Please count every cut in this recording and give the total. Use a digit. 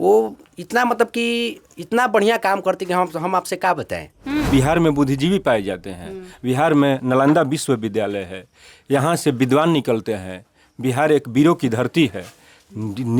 1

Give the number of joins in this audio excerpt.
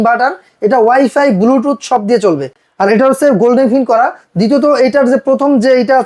0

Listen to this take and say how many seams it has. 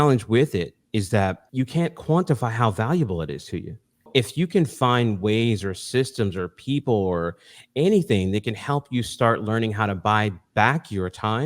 2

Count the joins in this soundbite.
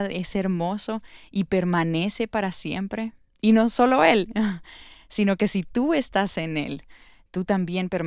0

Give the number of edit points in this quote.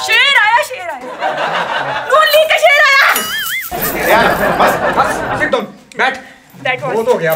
0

